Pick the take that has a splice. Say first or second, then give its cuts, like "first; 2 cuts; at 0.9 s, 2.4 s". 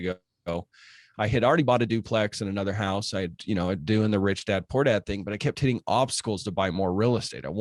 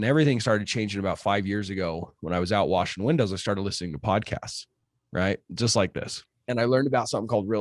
second; 1 cut; at 6.4 s